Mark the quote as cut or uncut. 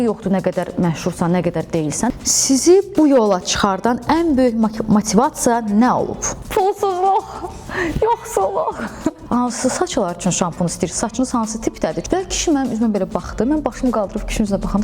cut